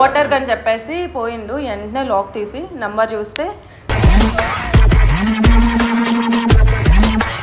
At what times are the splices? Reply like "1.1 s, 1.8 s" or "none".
none